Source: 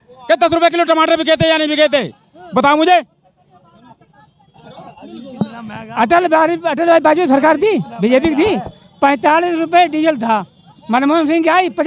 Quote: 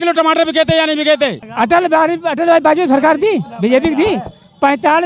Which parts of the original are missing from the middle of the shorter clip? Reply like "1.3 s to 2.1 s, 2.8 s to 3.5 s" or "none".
2.1 s to 5.8 s